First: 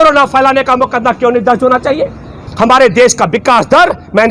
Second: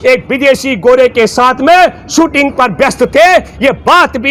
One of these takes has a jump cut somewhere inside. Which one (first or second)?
first